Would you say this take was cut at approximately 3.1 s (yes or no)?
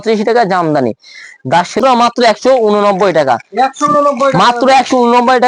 no